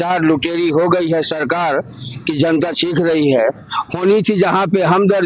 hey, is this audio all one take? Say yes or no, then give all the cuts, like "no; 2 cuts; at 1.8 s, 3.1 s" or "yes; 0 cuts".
yes; 0 cuts